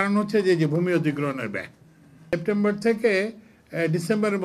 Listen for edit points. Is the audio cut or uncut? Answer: cut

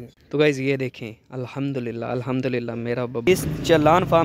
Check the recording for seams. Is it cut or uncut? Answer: cut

